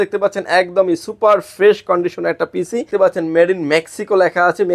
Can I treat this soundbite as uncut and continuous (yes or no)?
no